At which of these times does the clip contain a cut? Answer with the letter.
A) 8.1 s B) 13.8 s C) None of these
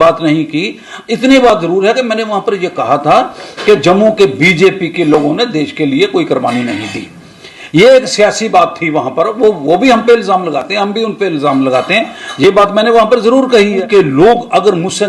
B